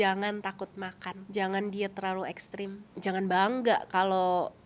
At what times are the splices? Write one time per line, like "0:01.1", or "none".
0:01.1
0:02.8